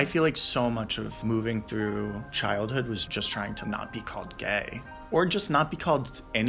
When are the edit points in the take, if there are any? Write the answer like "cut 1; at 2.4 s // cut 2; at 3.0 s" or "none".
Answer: cut 1; at 1.1 s // cut 2; at 2.3 s

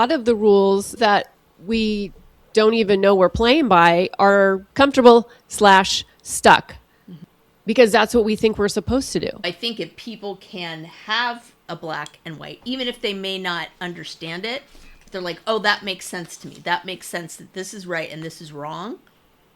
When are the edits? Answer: cut 1; at 0.9 s // cut 2; at 4.6 s // cut 3; at 9.5 s

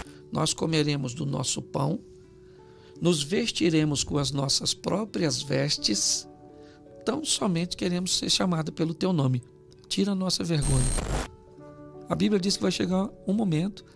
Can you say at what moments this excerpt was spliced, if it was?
none

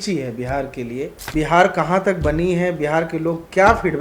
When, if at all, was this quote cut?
cut 1; at 1.3 s

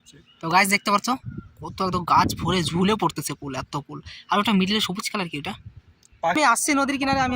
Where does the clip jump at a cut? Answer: cut 1; at 6.4 s

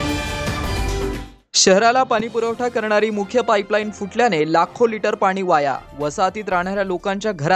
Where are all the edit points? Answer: cut 1; at 1.0 s

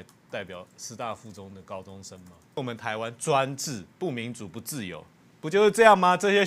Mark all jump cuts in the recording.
cut 1; at 2.6 s

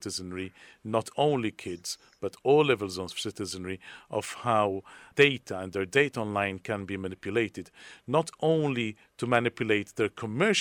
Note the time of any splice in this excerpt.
cut 1; at 4.9 s

